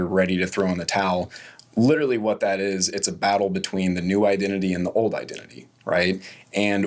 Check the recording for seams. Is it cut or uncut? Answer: uncut